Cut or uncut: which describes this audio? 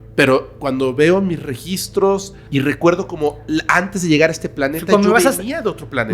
cut